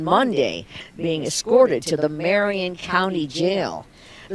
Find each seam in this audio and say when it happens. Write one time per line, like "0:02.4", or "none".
none